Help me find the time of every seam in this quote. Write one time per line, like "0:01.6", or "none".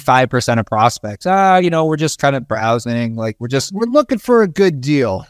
none